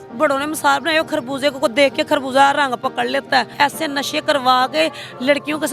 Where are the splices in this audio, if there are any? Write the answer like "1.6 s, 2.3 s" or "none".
3.5 s